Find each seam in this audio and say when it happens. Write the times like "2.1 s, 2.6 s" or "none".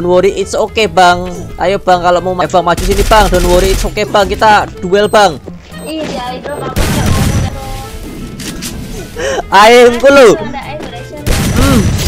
2.4 s, 7.5 s